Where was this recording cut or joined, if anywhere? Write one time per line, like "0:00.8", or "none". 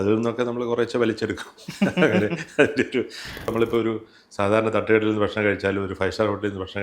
0:03.5